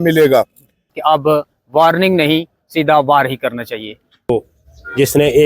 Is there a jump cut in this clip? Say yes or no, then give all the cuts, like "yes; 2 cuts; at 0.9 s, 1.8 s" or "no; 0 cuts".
yes; 2 cuts; at 0.9 s, 4.3 s